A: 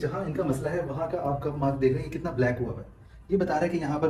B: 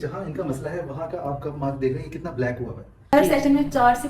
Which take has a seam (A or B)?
B